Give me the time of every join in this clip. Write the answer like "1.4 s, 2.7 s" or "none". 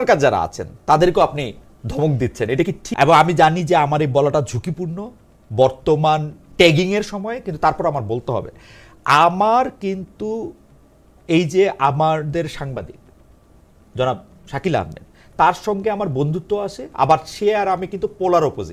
2.8 s